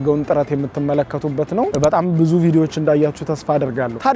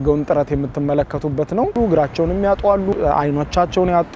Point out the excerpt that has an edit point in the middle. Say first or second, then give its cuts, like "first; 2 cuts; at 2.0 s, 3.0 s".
second; 2 cuts; at 1.7 s, 2.9 s